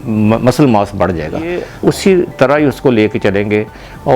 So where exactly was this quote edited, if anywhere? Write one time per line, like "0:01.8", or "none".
0:01.7